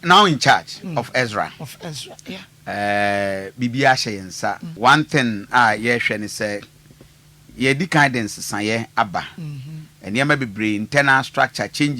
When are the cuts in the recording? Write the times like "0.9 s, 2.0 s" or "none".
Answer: 4.7 s

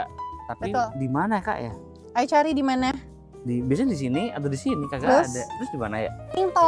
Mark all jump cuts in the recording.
none

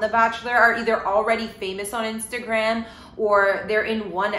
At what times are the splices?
none

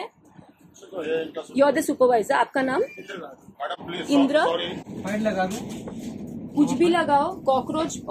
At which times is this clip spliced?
4.8 s

